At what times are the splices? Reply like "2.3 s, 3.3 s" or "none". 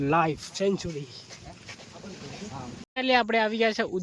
2.8 s